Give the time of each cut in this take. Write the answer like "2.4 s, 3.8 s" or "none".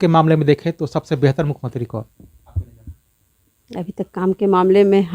none